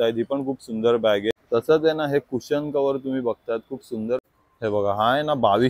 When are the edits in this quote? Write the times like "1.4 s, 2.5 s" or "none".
1.4 s, 4.2 s